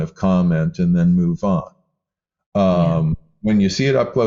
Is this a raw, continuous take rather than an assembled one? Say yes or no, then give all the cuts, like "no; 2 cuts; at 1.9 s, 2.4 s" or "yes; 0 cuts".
yes; 0 cuts